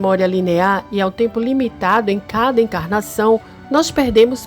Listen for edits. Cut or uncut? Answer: cut